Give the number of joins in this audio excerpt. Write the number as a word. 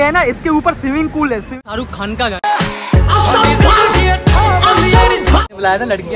two